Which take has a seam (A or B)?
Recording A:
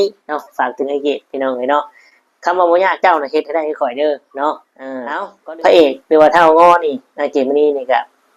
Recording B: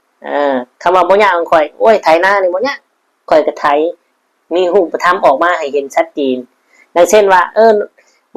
A